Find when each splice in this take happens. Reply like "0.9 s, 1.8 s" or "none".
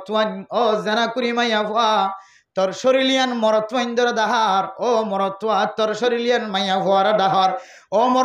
none